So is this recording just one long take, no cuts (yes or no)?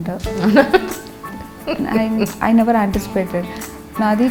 yes